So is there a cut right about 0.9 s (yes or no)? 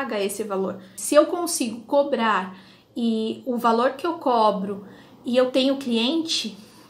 yes